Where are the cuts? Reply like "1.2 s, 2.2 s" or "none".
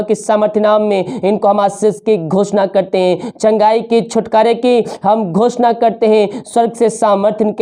none